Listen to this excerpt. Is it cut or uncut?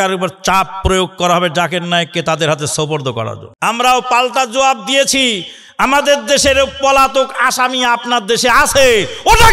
cut